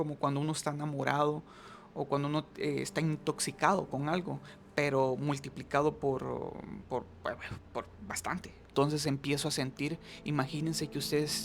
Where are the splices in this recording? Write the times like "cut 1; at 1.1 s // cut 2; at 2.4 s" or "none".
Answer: cut 1; at 8.7 s